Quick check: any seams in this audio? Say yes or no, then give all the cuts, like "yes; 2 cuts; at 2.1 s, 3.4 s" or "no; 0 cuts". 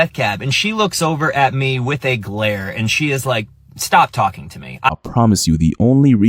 yes; 1 cut; at 4.9 s